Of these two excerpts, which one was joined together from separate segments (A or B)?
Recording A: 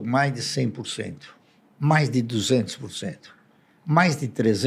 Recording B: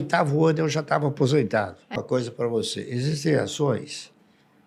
B